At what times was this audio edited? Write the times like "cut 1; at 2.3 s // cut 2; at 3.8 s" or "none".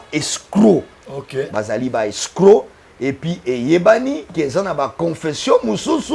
none